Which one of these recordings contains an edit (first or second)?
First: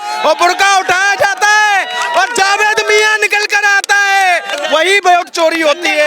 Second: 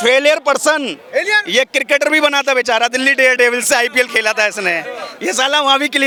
first